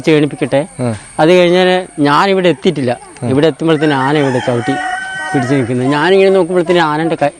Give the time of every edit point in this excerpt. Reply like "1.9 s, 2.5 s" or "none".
none